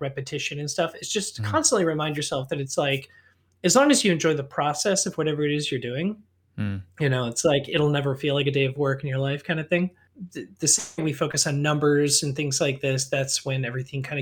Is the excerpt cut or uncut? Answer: cut